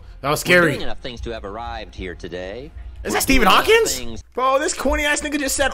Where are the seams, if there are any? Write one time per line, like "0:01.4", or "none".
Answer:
0:04.3